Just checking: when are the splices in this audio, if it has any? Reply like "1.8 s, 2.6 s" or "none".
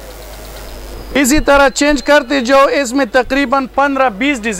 1.2 s